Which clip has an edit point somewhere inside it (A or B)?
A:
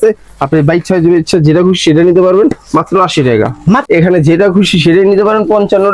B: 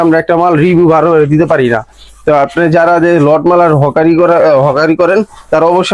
A